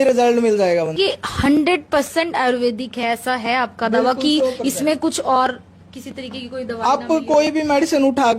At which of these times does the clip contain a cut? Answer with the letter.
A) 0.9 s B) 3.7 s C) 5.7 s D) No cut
A